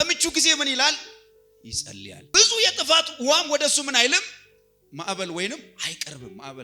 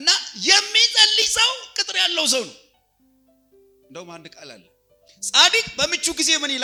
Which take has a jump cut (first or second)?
first